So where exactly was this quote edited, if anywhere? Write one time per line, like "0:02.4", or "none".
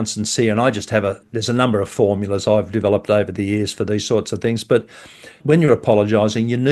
0:01.3
0:05.4